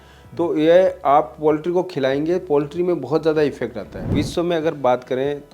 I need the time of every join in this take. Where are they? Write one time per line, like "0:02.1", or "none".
0:04.1